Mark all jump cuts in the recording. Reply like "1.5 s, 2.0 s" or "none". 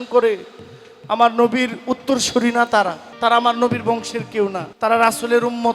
3.1 s, 4.7 s